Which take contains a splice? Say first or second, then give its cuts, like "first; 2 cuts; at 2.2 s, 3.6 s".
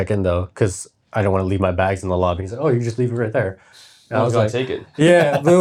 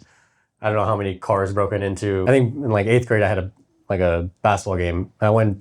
second; 1 cut; at 2.2 s